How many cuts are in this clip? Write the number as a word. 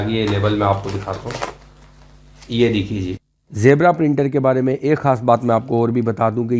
one